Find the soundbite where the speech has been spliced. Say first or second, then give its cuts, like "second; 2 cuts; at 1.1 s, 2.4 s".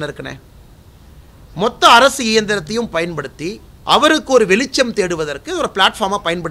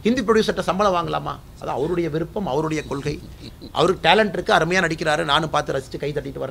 first; 1 cut; at 3.7 s